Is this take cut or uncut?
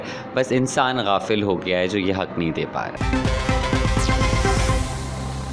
cut